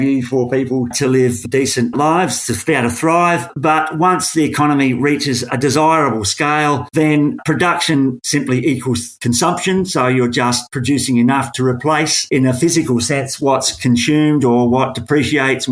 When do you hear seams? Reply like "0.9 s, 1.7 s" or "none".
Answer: none